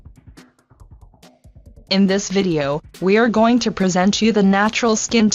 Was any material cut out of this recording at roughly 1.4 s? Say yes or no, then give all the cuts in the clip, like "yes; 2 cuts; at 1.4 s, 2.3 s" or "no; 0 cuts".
yes; 1 cut; at 1.4 s